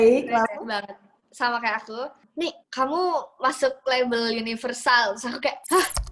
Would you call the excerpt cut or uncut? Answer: cut